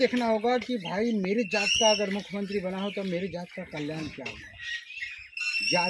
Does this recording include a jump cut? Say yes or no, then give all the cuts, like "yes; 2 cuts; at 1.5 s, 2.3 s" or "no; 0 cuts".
no; 0 cuts